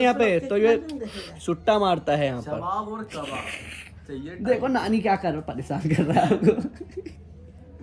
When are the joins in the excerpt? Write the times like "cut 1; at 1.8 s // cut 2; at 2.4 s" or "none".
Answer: none